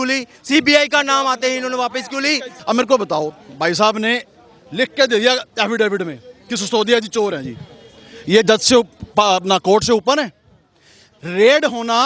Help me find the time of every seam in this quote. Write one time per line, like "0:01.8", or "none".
0:02.5

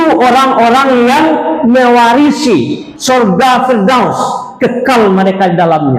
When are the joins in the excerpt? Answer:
0:02.9

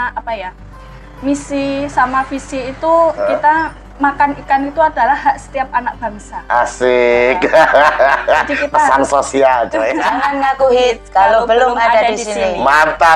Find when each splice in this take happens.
0:10.1

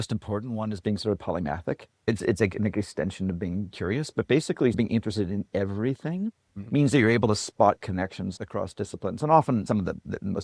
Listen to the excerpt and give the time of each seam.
0:02.1
0:04.8

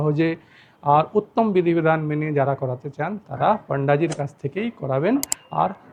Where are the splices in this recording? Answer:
none

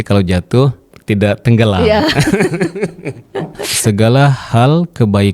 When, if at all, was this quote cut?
0:00.9
0:03.6

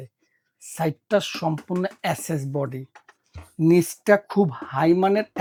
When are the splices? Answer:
none

